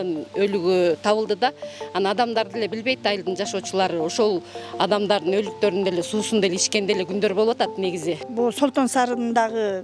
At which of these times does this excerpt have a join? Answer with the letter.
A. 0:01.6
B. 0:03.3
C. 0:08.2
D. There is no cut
C